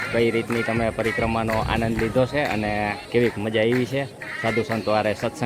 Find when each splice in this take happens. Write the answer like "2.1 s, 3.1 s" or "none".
3.0 s